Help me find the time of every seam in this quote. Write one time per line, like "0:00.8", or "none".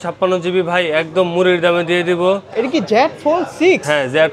0:02.5